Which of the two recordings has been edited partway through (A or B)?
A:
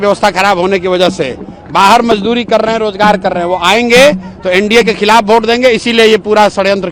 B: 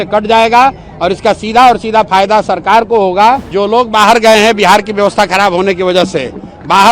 B